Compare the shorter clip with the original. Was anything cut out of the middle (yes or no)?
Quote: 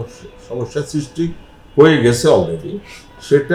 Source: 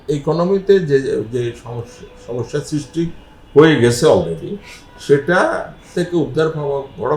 no